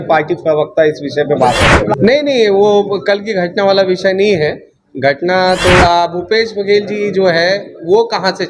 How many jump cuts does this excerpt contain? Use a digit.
2